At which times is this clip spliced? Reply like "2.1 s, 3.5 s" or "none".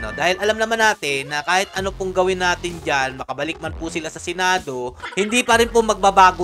4.9 s

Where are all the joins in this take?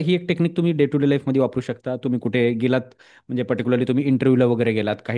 none

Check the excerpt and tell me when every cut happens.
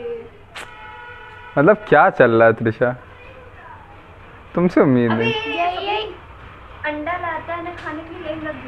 none

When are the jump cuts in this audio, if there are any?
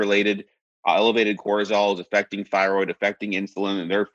none

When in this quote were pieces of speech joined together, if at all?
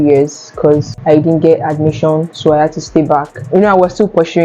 0.9 s

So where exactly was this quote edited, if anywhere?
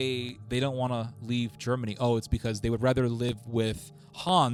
none

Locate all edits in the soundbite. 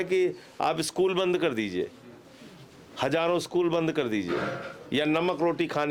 none

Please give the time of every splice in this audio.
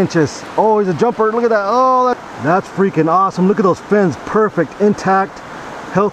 2.2 s

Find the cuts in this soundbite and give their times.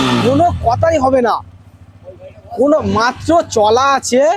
none

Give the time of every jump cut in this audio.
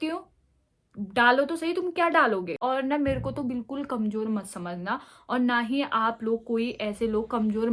2.6 s

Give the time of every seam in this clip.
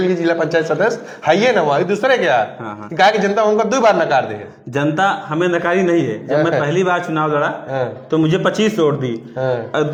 none

